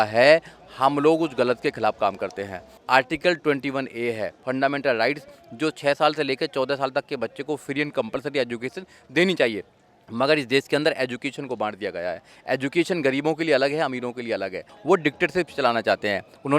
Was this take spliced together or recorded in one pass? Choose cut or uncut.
cut